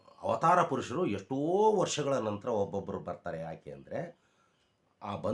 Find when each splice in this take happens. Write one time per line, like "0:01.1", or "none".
none